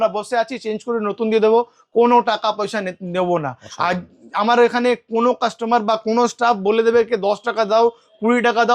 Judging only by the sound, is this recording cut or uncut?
uncut